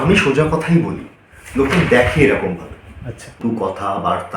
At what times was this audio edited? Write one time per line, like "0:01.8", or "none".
0:03.4